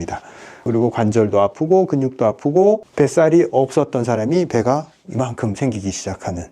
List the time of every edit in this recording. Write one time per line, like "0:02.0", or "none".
0:02.9